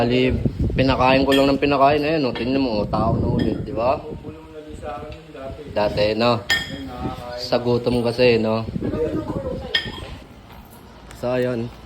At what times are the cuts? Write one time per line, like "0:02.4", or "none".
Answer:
0:10.1